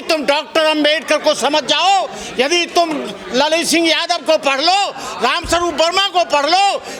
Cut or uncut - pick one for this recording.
uncut